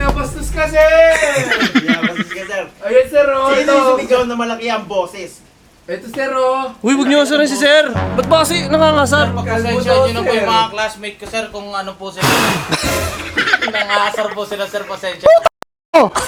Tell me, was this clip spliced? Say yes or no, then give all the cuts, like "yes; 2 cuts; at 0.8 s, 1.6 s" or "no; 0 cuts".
no; 0 cuts